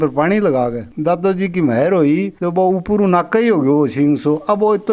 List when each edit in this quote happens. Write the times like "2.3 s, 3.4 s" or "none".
0.9 s